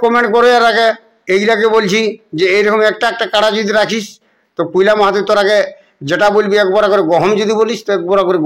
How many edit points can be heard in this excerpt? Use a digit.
0